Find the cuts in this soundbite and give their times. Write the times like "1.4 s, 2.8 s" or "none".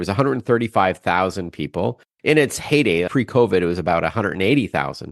3.1 s